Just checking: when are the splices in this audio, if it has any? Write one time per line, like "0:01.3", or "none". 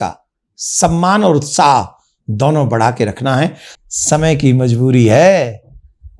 0:03.7